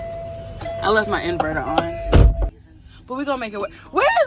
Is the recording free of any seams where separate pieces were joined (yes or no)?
no